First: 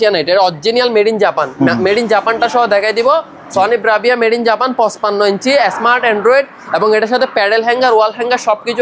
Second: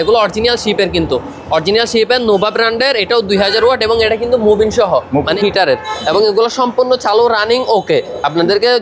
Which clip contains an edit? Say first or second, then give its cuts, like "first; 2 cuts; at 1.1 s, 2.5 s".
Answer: second; 1 cut; at 5.4 s